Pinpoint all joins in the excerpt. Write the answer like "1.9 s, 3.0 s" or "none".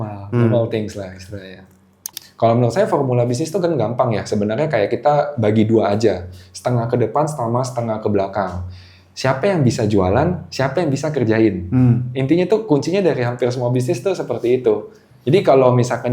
2.0 s